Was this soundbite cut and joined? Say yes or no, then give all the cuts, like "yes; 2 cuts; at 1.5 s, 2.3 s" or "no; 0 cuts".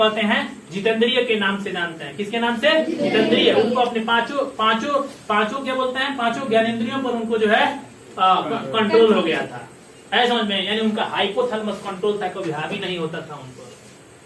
no; 0 cuts